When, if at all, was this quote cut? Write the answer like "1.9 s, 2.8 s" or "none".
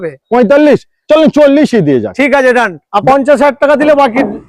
3.0 s